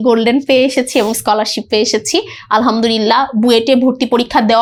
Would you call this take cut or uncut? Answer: uncut